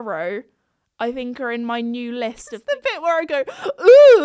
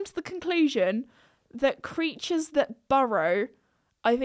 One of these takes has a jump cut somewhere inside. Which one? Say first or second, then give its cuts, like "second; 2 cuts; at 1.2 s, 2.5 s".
first; 1 cut; at 2.5 s